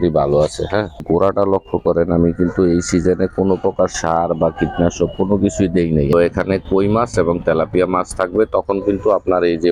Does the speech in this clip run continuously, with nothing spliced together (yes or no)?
no